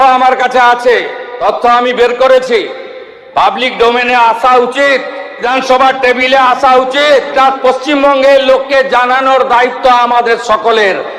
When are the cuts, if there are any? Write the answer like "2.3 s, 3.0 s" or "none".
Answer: 1.2 s, 5.4 s, 7.3 s